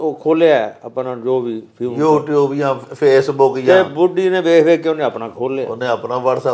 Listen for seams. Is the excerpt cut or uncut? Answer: uncut